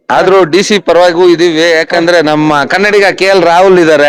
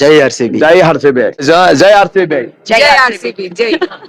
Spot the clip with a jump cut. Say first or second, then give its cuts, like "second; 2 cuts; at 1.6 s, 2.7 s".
second; 1 cut; at 1.4 s